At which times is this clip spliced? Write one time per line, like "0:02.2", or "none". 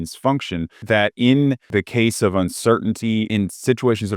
0:00.8
0:01.7
0:03.3